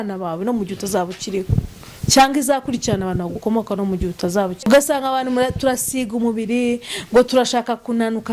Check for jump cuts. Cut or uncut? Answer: uncut